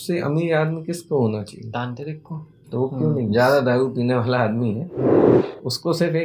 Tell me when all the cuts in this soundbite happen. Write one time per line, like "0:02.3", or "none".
0:03.3